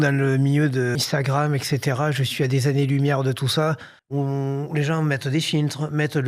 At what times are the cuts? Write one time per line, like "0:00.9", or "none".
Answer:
0:01.0
0:03.9